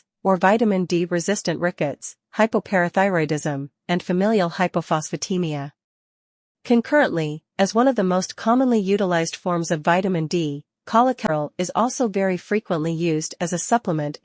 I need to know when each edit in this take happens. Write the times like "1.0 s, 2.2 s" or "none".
12.4 s